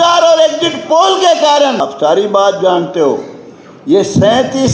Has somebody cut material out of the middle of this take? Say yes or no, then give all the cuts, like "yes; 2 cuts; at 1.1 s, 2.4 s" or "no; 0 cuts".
yes; 1 cut; at 1.8 s